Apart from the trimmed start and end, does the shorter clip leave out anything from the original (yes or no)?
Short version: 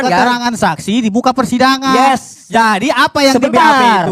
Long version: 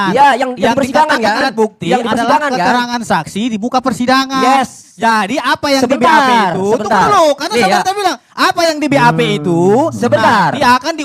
no